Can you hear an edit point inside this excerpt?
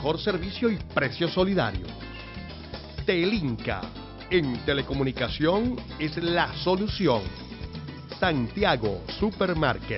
no; 0 cuts

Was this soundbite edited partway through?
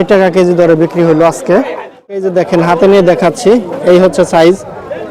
yes; 1 cut; at 2.3 s

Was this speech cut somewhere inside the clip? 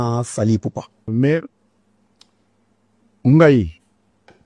yes; 1 cut; at 1.1 s

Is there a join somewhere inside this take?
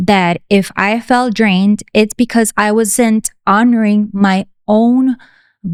no; 0 cuts

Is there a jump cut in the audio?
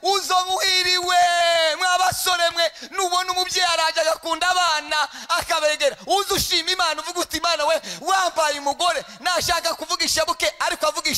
no; 0 cuts

